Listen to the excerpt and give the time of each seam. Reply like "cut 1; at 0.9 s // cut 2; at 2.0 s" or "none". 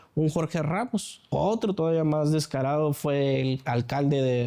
cut 1; at 1.2 s